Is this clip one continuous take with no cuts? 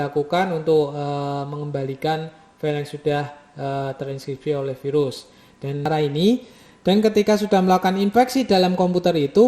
no; 1 cut; at 5.9 s

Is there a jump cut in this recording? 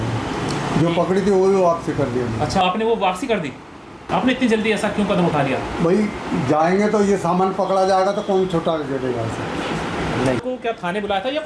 yes; 3 cuts; at 2.6 s, 4.0 s, 10.4 s

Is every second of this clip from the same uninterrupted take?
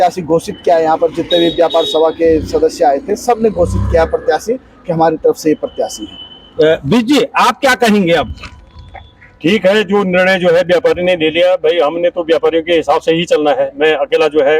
yes; 0 cuts

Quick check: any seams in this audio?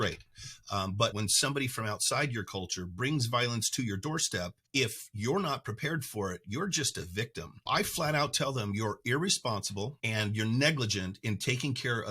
yes; 4 cuts; at 1.1 s, 4.6 s, 7.6 s, 10.0 s

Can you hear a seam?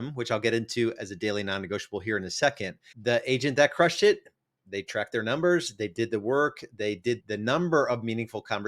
yes; 1 cut; at 7.2 s

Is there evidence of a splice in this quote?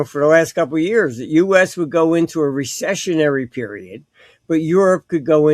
no; 0 cuts

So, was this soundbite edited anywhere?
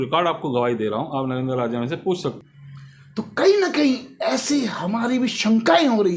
yes; 1 cut; at 2.4 s

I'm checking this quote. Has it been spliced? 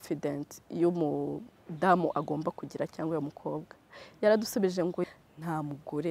yes; 1 cut; at 5.0 s

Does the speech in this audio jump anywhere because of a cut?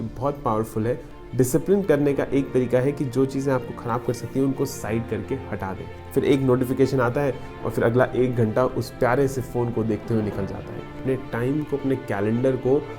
yes; 3 cuts; at 1.1 s, 6.0 s, 10.9 s

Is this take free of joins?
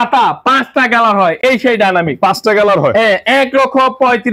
yes; 0 cuts

